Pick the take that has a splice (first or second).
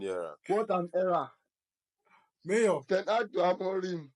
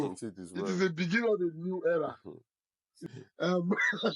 second